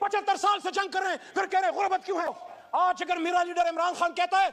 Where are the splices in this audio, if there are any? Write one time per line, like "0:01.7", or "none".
0:02.4